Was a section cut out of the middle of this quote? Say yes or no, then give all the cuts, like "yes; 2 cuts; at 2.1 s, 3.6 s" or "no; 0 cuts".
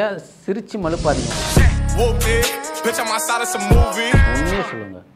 no; 0 cuts